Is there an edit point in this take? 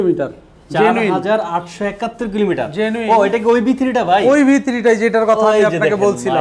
no; 0 cuts

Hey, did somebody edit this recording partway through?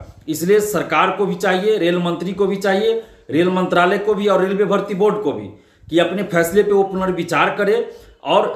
no; 0 cuts

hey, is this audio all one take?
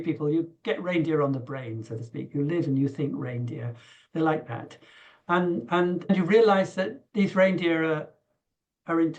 no; 1 cut; at 6.1 s

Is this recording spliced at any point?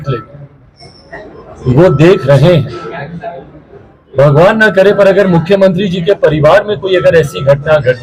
no; 0 cuts

